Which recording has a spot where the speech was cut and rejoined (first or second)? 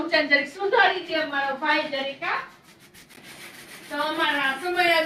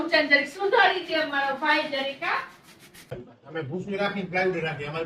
second